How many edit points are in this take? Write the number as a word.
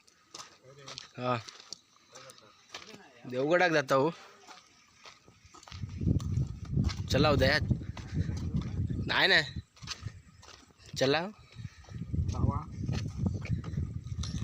zero